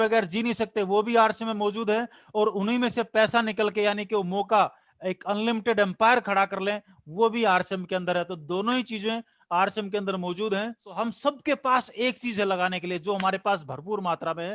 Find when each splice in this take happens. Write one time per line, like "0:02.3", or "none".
0:11.0